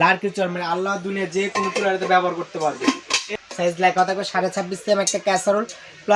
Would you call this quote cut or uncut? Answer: cut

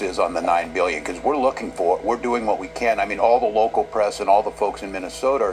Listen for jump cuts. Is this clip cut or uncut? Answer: uncut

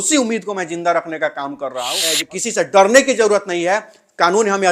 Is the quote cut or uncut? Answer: cut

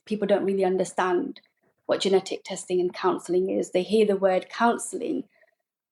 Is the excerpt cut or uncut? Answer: uncut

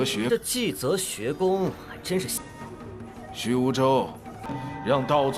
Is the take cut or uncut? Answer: uncut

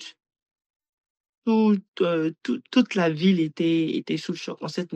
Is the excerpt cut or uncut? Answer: uncut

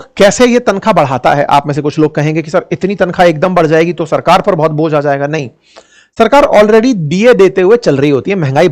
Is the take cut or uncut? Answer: uncut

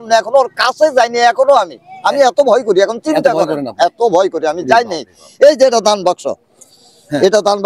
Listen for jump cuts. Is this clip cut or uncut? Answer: uncut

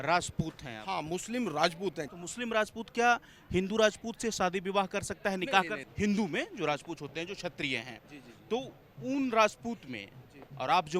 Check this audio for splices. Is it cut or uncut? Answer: cut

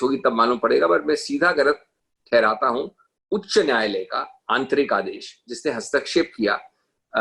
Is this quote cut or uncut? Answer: uncut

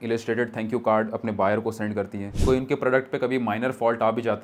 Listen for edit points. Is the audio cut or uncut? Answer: uncut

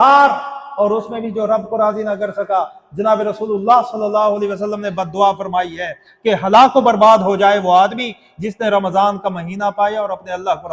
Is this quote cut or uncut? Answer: uncut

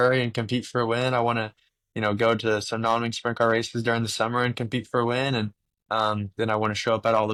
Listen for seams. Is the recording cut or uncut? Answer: uncut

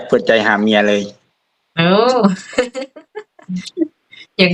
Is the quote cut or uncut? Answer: uncut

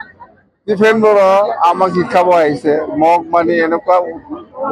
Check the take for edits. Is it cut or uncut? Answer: uncut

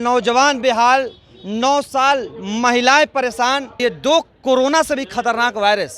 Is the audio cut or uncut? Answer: cut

